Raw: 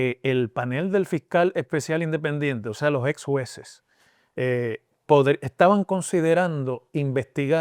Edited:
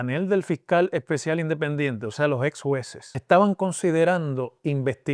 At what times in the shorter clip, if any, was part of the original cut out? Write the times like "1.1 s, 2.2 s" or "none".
3.2 s